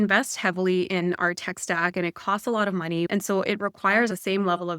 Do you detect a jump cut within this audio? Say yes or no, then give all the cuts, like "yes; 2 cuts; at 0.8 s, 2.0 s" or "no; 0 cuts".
yes; 2 cuts; at 3.1 s, 4.1 s